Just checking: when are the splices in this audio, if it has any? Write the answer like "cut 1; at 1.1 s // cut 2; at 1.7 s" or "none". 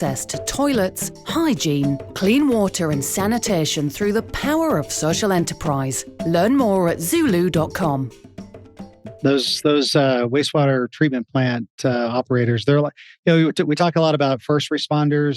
cut 1; at 9.1 s